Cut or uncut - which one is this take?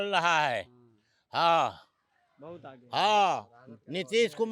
uncut